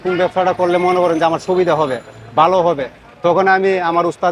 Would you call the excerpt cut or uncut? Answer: uncut